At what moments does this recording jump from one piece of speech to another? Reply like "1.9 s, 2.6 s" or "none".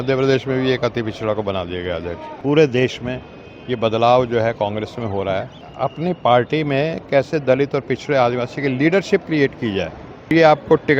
2.3 s, 5.7 s, 10.3 s

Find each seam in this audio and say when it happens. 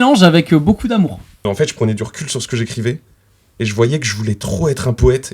1.3 s

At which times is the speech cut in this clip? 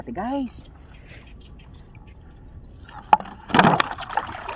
none

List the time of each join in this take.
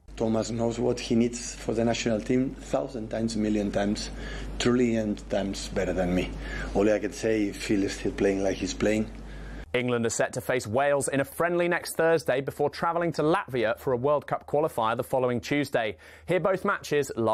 none

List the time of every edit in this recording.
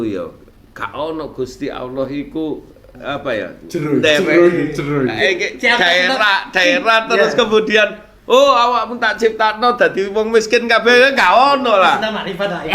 none

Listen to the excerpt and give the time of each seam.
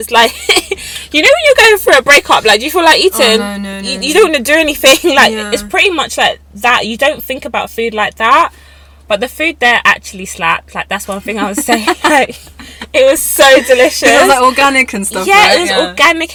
none

